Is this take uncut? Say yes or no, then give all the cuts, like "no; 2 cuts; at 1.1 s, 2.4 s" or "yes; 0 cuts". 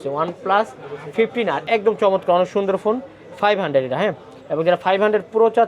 no; 1 cut; at 1.6 s